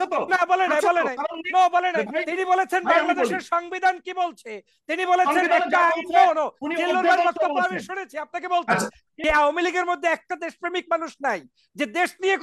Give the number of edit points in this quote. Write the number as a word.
one